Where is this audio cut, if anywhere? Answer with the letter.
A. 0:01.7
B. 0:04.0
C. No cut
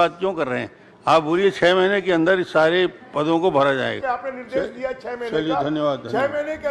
B